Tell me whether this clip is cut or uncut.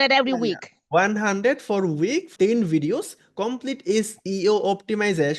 cut